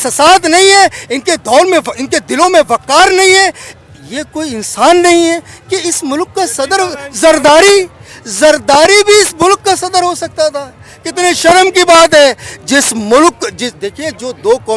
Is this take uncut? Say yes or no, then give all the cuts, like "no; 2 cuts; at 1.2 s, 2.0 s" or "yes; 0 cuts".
yes; 0 cuts